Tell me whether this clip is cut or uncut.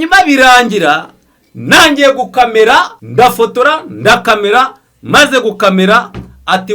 cut